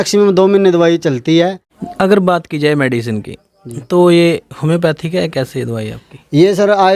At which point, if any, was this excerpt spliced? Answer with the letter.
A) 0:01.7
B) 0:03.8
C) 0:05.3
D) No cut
A